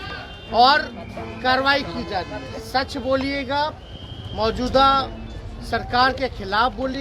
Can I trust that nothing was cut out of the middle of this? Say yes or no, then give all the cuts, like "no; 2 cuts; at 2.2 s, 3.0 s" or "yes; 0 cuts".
yes; 0 cuts